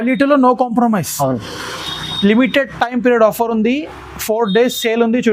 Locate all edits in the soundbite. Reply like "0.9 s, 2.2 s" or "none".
none